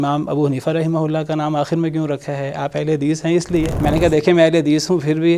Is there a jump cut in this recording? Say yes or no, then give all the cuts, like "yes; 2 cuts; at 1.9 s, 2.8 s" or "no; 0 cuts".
yes; 1 cut; at 3.7 s